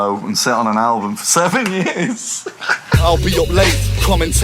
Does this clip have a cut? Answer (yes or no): yes